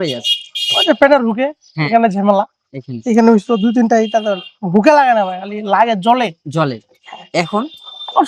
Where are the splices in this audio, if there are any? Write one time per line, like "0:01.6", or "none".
none